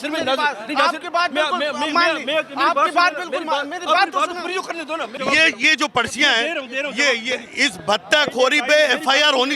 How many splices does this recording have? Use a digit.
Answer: 1